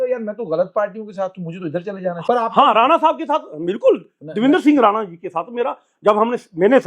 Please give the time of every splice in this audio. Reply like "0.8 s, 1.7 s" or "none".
2.2 s